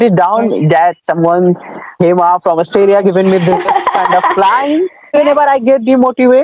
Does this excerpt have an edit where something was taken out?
no; 0 cuts

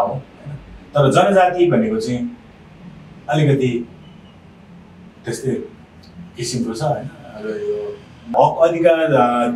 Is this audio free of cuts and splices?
no; 1 cut; at 8.3 s

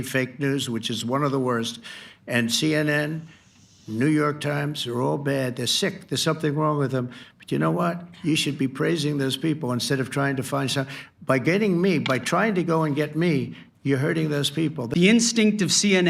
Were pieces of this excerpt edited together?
yes; 1 cut; at 14.8 s

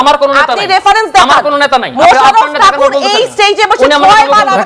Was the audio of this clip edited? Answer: no; 0 cuts

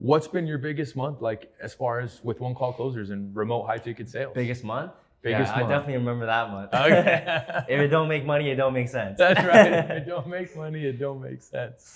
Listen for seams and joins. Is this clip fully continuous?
yes; 0 cuts

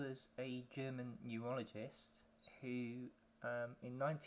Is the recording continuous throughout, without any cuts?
no; 1 cut; at 2.5 s

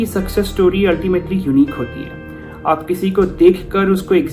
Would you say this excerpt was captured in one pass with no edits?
yes; 0 cuts

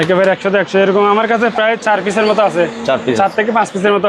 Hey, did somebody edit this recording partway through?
no; 0 cuts

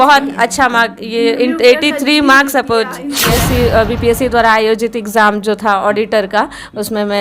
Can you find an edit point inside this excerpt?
yes; 1 cut; at 3.1 s

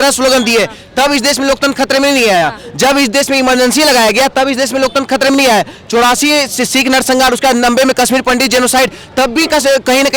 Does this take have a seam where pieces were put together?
no; 0 cuts

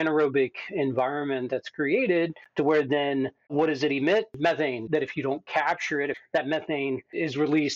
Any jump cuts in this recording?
yes; 2 cuts; at 4.8 s, 6.2 s

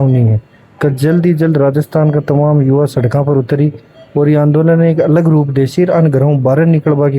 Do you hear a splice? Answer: no; 0 cuts

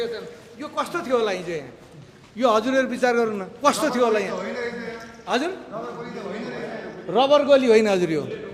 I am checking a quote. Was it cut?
no; 0 cuts

